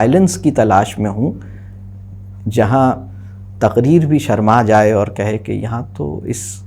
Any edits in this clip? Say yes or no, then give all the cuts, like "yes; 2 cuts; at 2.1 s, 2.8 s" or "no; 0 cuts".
no; 0 cuts